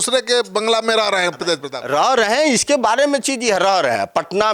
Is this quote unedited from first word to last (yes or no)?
yes